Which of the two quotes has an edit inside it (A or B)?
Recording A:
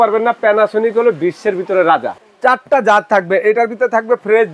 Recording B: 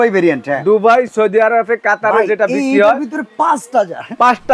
A